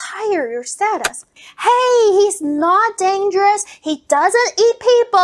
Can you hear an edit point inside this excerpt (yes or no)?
yes